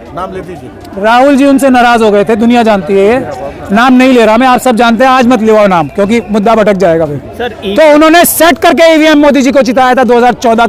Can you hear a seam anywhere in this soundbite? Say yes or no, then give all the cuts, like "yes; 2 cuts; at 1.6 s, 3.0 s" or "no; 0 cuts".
no; 0 cuts